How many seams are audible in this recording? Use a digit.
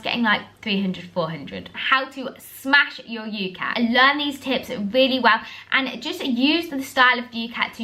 2